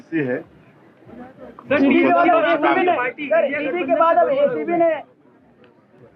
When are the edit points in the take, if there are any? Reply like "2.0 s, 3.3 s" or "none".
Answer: none